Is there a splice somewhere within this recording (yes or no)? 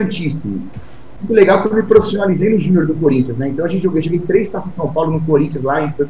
yes